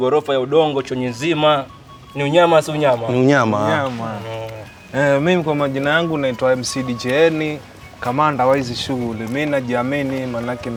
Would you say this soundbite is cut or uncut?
uncut